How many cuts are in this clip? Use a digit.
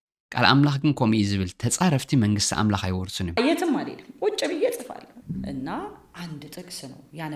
1